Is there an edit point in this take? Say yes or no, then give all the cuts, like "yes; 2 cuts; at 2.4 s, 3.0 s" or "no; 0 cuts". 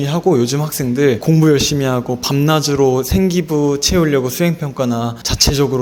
no; 0 cuts